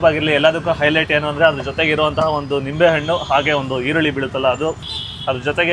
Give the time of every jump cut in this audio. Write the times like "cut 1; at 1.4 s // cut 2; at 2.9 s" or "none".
cut 1; at 4.8 s